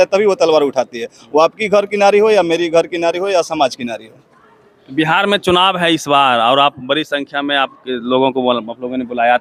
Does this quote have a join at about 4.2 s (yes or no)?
no